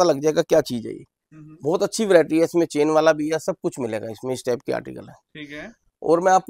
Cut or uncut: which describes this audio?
uncut